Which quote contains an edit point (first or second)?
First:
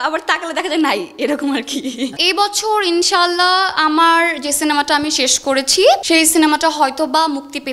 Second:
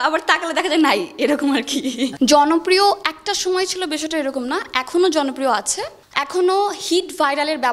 first